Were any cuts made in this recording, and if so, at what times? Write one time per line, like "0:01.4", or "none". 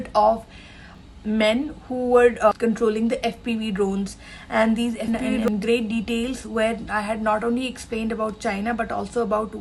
0:05.3